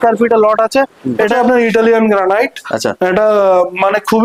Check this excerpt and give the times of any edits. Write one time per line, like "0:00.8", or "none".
0:01.3